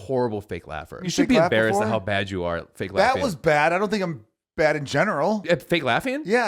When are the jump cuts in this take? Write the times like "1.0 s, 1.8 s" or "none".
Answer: 1.0 s, 5.4 s